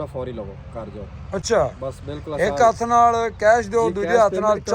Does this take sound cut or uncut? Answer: uncut